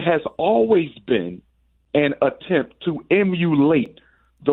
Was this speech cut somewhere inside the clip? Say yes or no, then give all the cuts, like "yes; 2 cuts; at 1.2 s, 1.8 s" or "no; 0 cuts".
no; 0 cuts